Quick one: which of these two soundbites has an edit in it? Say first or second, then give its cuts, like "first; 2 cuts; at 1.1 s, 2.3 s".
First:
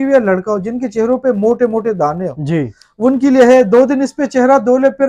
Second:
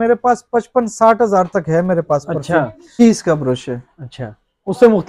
second; 1 cut; at 3.0 s